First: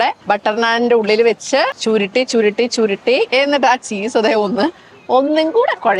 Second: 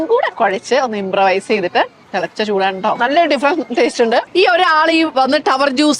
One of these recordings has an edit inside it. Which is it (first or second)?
second